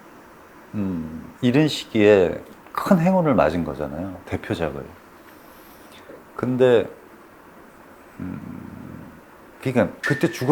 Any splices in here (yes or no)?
no